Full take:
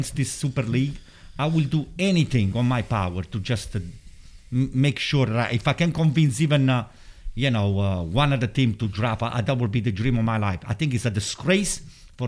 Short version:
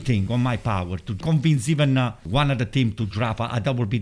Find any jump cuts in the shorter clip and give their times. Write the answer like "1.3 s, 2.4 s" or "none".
1.2 s, 2.2 s

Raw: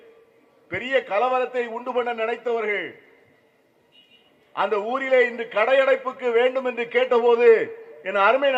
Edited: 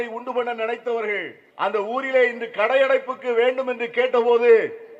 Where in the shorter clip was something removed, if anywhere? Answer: 1.4 s

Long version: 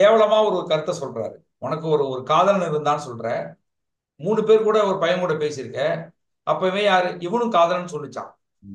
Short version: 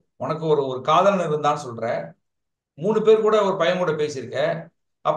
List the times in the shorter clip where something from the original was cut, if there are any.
none

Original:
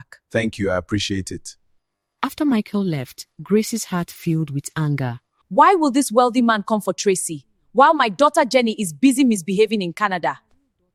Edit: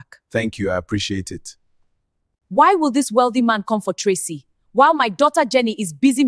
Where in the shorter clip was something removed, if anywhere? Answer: 2.1 s

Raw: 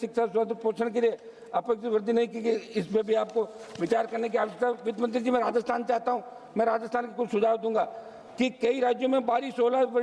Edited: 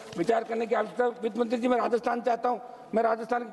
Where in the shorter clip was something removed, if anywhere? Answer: none

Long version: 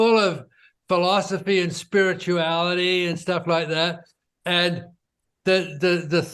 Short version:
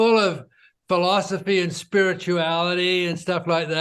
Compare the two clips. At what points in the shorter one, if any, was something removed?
none

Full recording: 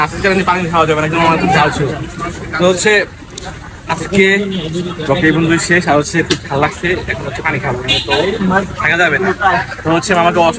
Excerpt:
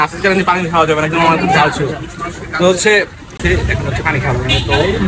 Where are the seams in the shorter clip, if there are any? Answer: 3.4 s

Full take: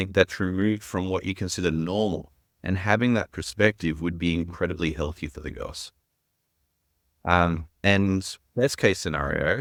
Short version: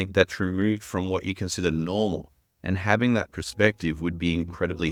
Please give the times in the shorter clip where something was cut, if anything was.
none

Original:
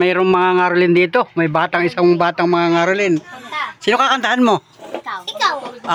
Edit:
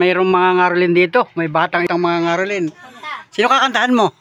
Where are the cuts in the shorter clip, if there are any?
1.9 s

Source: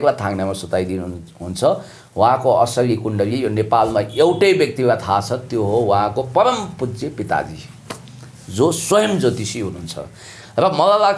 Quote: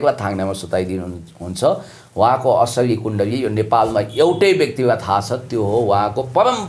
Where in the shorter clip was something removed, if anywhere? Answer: none

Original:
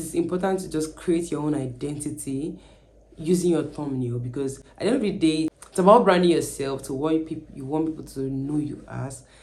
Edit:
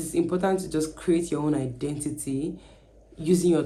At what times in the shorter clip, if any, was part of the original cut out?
none

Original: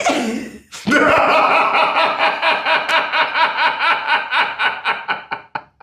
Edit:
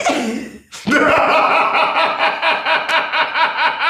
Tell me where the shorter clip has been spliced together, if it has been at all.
none

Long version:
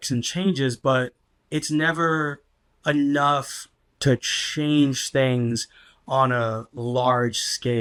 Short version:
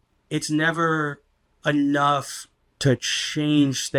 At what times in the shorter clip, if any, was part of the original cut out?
none

